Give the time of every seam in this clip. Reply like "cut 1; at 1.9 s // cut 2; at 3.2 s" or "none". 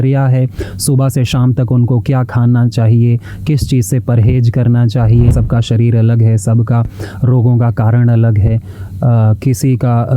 cut 1; at 5.3 s